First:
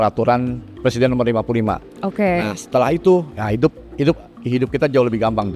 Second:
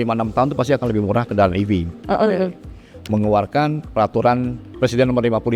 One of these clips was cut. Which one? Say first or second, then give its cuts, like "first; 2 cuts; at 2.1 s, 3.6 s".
second; 2 cuts; at 1.3 s, 2.9 s